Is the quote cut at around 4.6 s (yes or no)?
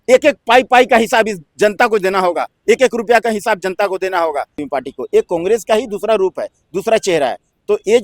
yes